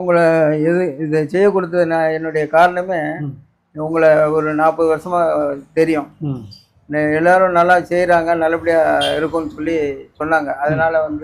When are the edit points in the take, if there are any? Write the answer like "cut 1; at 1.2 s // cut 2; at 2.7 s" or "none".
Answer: none